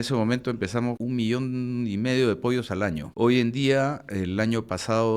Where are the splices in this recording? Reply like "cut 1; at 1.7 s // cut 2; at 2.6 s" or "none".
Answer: cut 1; at 1.0 s // cut 2; at 3.1 s